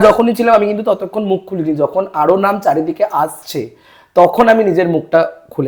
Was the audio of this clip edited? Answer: no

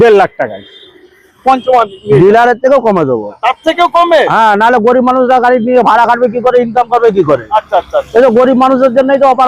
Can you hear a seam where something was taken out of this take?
yes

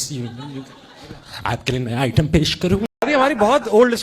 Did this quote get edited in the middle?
yes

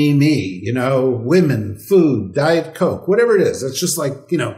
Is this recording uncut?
yes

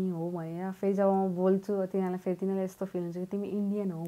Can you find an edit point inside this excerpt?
no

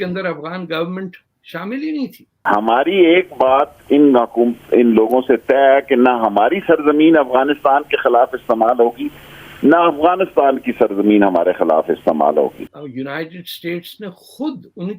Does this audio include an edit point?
yes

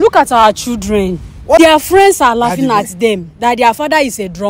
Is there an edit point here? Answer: yes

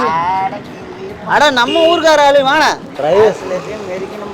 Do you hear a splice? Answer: yes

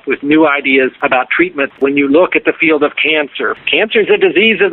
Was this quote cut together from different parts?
yes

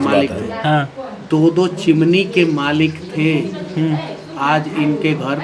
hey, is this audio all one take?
yes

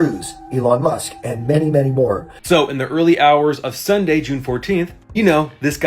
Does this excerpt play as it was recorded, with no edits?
no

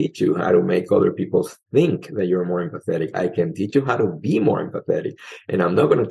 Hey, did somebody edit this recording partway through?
yes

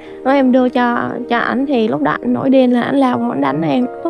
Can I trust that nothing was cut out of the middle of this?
yes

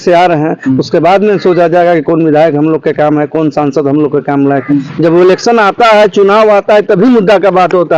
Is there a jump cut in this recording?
yes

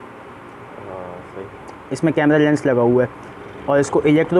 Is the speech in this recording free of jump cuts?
yes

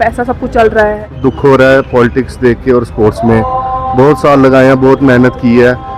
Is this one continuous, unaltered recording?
no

